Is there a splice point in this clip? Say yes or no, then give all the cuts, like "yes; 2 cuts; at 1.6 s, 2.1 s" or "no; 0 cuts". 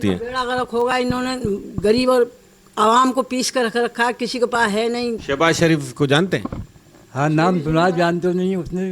yes; 1 cut; at 5.2 s